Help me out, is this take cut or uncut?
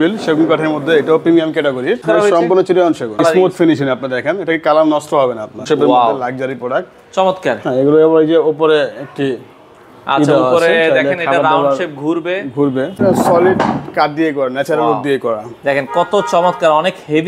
cut